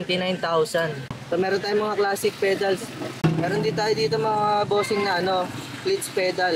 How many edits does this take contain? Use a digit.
2